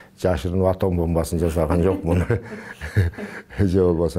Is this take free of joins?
yes; 0 cuts

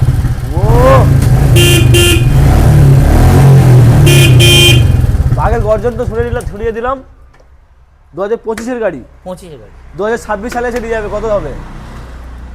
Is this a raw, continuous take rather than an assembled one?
yes; 0 cuts

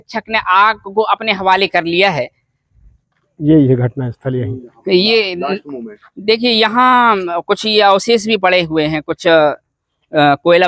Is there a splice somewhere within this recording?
no; 0 cuts

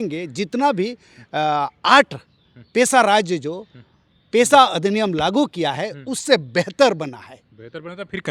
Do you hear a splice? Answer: no; 0 cuts

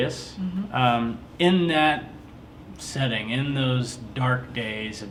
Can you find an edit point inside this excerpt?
no; 0 cuts

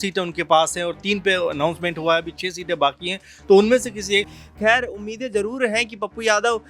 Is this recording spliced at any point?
yes; 1 cut; at 4.4 s

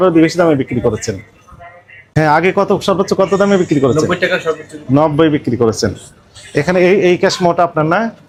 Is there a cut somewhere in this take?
no; 0 cuts

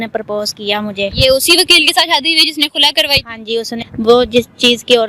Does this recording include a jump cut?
yes; 1 cut; at 3.8 s

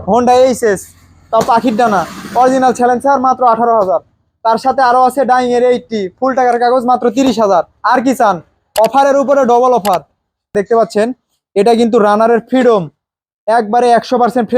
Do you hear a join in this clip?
yes; 1 cut; at 10.5 s

